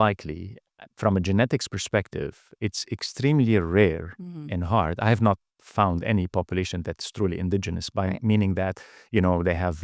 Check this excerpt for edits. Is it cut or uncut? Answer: uncut